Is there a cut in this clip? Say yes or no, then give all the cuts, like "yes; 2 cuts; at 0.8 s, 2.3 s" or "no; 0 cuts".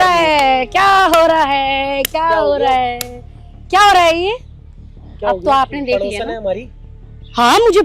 no; 0 cuts